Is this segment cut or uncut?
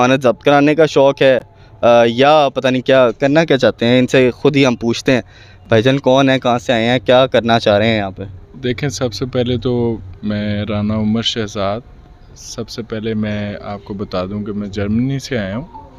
uncut